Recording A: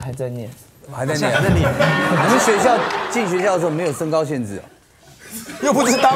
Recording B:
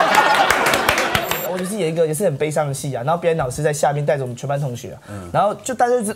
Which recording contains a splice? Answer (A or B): B